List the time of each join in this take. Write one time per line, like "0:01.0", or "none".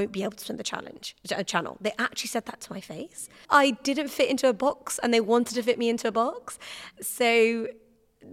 0:03.3
0:06.9

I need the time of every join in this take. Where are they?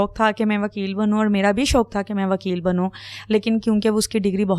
none

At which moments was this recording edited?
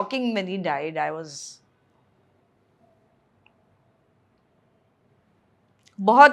none

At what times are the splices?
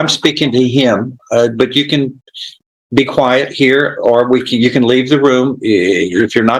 none

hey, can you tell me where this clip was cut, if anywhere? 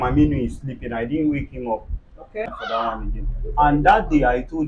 0:02.5

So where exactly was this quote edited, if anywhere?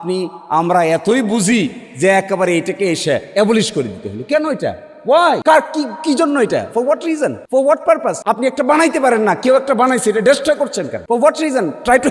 0:05.4
0:07.4
0:08.2
0:10.9

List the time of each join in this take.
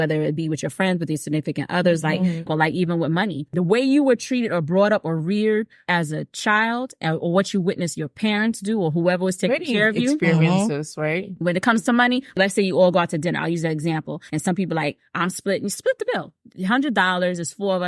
0:02.5
0:03.5
0:05.8
0:12.3
0:14.1

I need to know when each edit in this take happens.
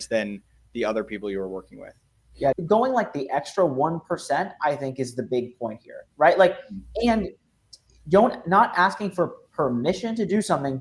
0:02.6

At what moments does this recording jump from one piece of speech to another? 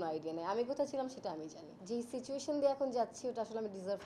0:01.7

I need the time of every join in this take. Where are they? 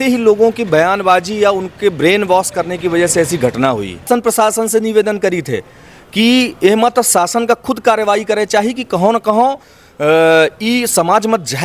0:04.1

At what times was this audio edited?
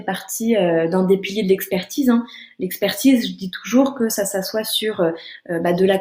none

